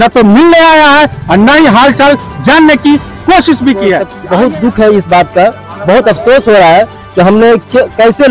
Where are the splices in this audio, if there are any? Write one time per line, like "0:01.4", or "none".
0:04.1